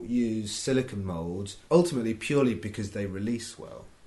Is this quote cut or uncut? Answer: cut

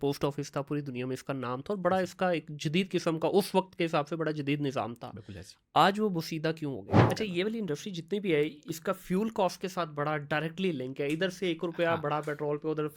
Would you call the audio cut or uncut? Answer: cut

